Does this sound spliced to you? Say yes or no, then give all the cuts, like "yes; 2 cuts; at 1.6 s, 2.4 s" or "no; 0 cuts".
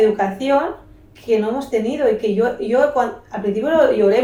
no; 0 cuts